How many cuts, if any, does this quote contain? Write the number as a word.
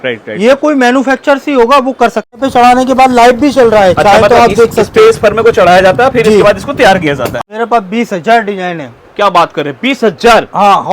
two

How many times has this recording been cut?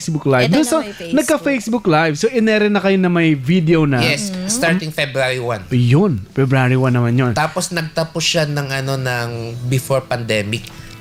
zero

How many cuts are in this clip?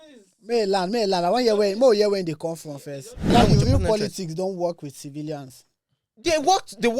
one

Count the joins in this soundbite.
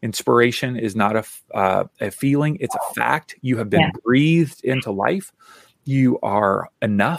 zero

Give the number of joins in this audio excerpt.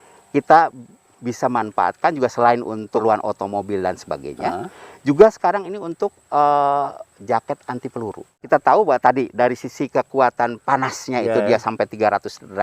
two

